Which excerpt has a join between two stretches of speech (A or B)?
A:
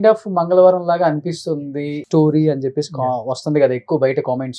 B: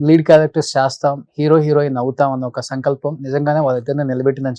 A